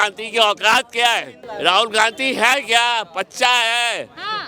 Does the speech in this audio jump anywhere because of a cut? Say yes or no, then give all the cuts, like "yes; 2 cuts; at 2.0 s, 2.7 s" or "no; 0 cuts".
yes; 1 cut; at 1.4 s